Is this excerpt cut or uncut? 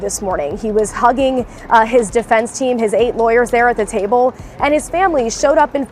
uncut